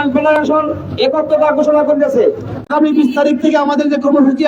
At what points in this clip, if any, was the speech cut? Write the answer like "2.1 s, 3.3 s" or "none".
2.6 s